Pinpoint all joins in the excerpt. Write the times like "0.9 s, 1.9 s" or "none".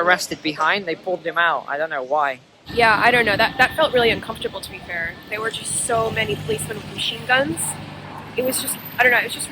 none